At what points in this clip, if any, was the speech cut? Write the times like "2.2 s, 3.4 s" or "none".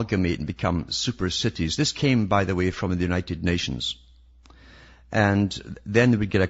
2.8 s